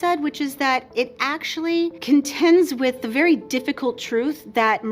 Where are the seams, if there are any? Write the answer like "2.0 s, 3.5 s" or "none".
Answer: 2.0 s